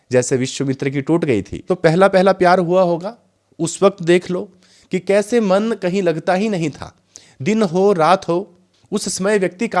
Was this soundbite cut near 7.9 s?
no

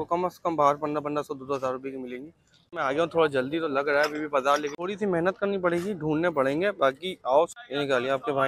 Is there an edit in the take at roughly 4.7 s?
yes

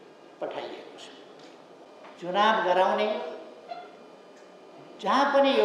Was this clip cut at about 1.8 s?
yes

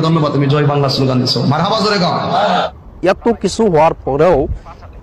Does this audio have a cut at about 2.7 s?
yes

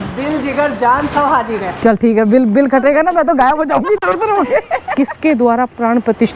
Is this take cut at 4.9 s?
yes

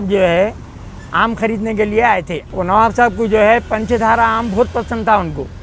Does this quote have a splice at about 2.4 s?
yes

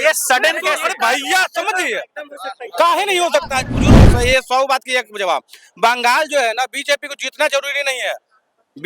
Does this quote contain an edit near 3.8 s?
yes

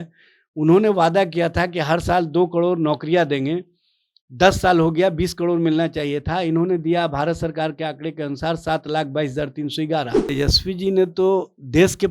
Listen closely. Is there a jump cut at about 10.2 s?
yes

